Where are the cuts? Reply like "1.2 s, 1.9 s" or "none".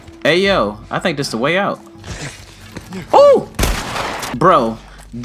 4.2 s